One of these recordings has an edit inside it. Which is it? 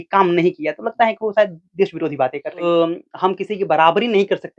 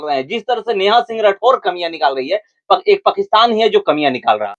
first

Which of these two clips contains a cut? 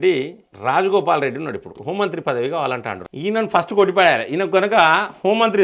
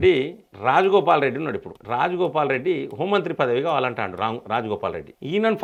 first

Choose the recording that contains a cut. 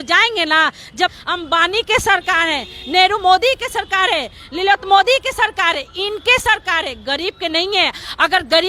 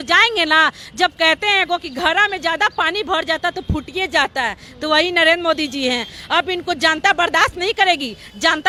first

